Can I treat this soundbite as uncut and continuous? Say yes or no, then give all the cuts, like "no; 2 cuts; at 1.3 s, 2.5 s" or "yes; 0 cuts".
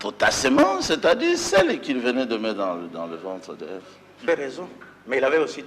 no; 1 cut; at 4.2 s